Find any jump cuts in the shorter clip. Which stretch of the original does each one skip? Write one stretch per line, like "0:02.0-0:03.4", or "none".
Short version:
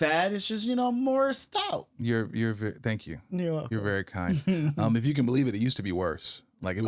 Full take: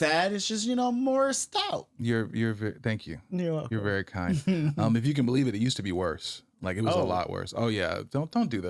none